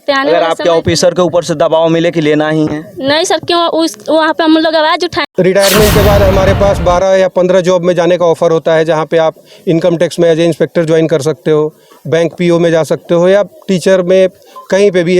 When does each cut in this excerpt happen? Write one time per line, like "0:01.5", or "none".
0:05.3